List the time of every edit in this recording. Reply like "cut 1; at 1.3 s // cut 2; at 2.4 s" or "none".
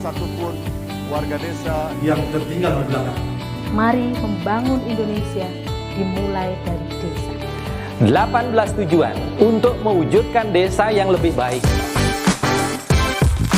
cut 1; at 11.6 s